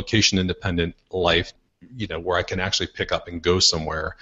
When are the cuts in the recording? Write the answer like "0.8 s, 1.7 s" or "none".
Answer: 1.6 s